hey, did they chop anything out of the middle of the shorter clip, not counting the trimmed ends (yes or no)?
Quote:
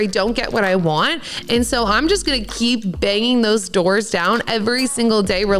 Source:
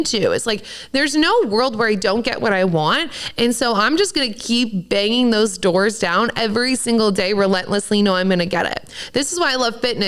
no